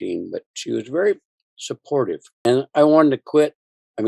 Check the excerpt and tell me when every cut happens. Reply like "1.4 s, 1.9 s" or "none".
2.3 s